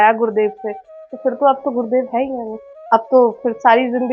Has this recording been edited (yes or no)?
no